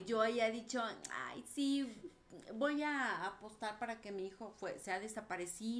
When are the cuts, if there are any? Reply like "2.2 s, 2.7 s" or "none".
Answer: none